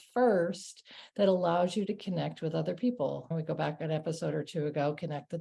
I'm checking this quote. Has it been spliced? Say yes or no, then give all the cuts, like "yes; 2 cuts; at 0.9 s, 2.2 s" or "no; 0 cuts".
yes; 1 cut; at 3.3 s